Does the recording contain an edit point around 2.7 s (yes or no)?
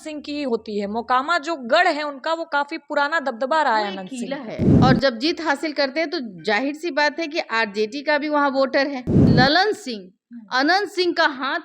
no